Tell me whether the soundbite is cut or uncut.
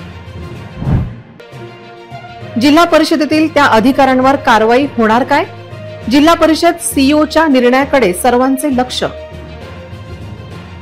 cut